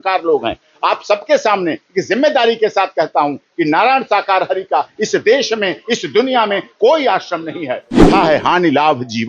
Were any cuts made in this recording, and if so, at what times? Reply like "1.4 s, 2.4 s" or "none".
8.1 s